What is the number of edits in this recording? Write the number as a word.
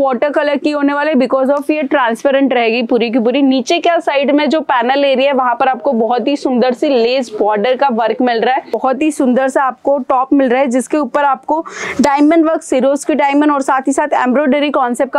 one